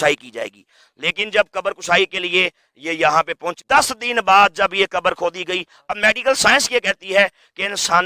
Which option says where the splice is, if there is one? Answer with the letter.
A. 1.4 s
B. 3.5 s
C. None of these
B